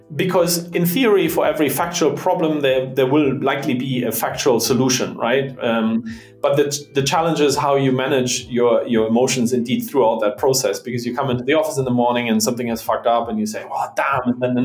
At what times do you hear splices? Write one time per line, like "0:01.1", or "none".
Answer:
none

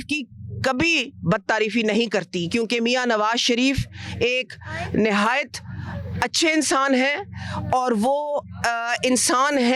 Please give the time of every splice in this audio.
none

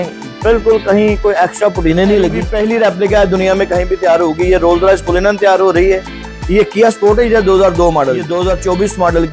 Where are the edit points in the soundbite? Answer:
0:02.4
0:08.3

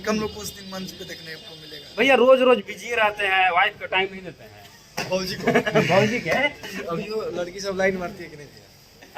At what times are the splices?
0:06.6

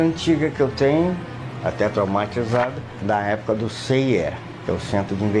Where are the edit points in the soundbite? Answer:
0:03.0
0:04.5

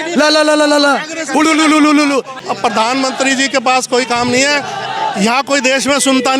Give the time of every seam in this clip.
0:02.4

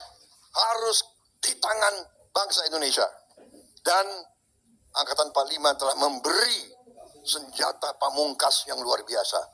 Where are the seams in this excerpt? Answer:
none

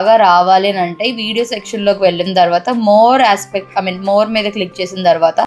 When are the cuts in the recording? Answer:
none

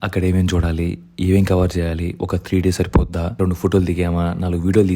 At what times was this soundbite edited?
0:03.4

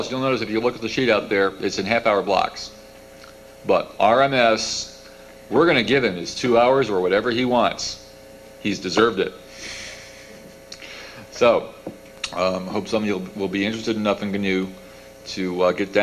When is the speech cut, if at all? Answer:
none

